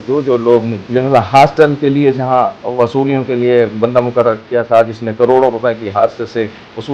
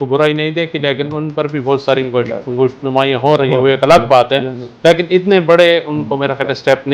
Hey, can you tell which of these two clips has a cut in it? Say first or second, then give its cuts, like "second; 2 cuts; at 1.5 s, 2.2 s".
first; 2 cuts; at 0.9 s, 2.6 s